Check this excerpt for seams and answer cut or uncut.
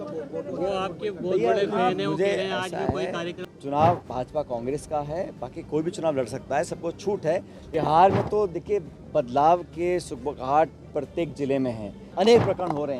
cut